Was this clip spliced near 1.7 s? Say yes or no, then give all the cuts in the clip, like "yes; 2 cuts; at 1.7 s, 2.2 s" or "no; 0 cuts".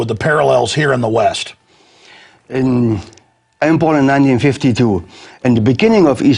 yes; 1 cut; at 1.7 s